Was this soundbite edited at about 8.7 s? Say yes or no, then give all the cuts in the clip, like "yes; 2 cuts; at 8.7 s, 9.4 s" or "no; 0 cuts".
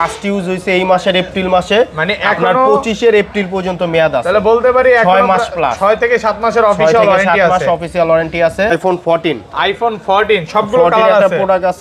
yes; 1 cut; at 8.7 s